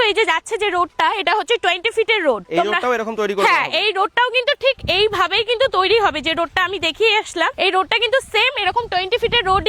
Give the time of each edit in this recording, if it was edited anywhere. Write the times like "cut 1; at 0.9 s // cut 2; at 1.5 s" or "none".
none